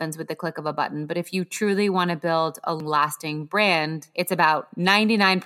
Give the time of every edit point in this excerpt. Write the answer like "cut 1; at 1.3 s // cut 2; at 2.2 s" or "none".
cut 1; at 2.8 s